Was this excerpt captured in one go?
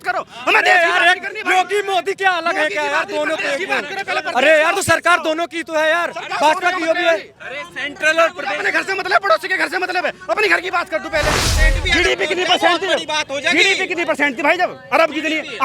no; 1 cut; at 11.5 s

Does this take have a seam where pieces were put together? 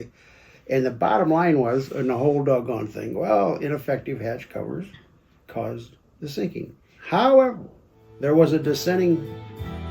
yes; 1 cut; at 6.9 s

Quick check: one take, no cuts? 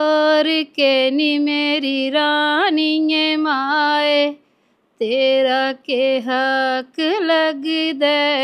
yes; 0 cuts

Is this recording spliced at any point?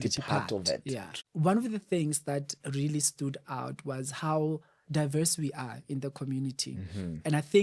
yes; 1 cut; at 1.2 s

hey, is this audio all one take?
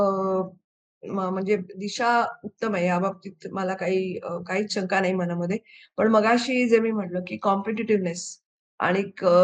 yes; 0 cuts

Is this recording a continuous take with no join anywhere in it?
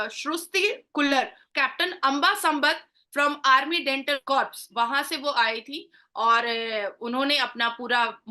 no; 1 cut; at 4.2 s

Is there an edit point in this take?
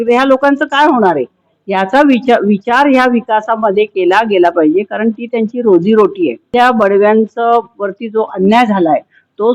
yes; 1 cut; at 6.5 s

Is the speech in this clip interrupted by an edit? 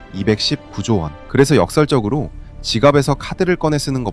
yes; 1 cut; at 1.2 s

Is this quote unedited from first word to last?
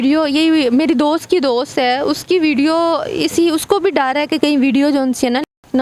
yes; 0 cuts

